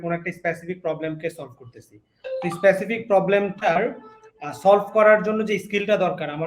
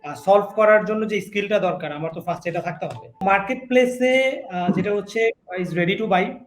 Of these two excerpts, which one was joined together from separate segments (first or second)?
second